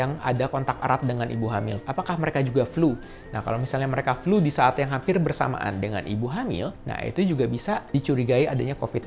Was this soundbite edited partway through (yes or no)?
no